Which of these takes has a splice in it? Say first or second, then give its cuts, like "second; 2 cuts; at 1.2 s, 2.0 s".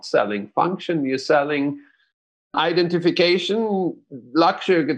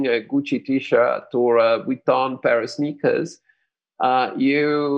first; 1 cut; at 2.6 s